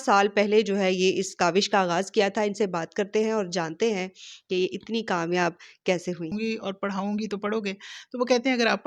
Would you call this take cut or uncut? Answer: cut